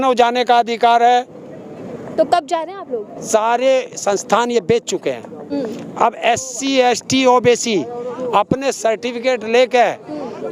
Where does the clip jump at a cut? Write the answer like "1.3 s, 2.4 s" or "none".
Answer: 3.1 s